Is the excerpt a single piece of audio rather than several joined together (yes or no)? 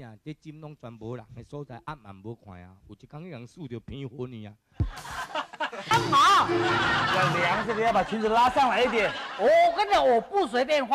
no